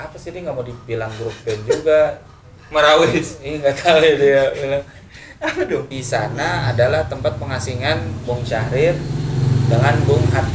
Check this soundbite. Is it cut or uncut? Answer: cut